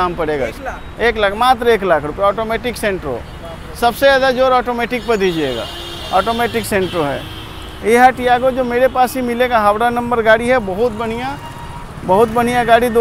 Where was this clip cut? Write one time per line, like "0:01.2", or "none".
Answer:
none